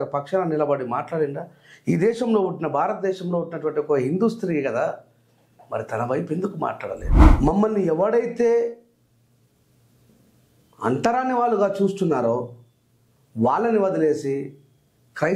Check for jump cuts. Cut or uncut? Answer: cut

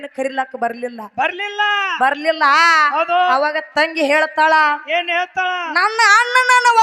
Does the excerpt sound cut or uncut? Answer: uncut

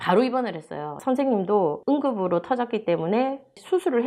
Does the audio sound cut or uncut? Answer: uncut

